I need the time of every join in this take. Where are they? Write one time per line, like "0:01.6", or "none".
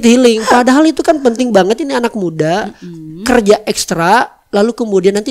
none

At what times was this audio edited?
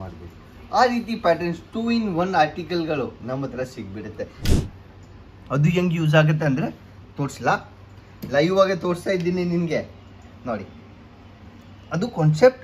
0:04.5

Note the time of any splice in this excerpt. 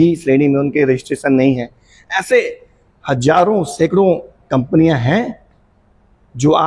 none

